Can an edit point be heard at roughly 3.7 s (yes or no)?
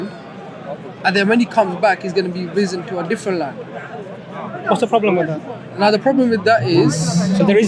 no